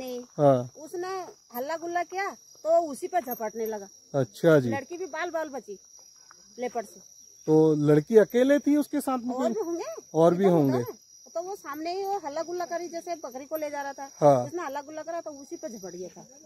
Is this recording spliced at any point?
no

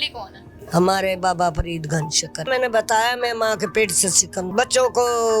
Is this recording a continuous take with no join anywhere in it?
no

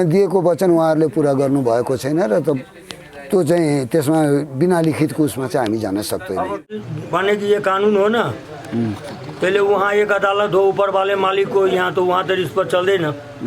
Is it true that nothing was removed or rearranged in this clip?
no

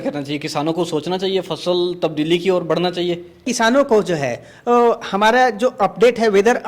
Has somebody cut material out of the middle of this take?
yes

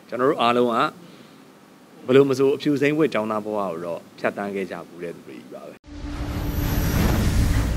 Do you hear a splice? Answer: yes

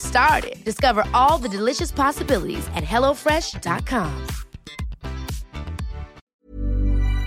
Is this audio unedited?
no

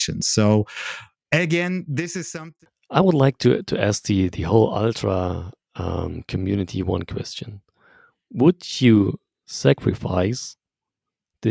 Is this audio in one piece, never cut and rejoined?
no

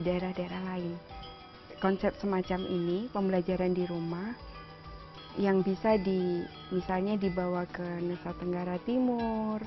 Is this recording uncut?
yes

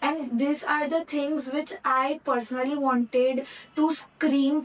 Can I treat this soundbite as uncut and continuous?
yes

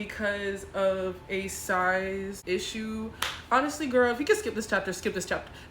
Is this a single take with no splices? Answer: no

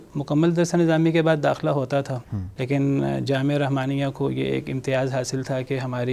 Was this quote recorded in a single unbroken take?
yes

